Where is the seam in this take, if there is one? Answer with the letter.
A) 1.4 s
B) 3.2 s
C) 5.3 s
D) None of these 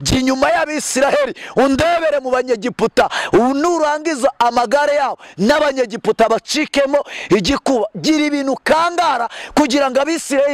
D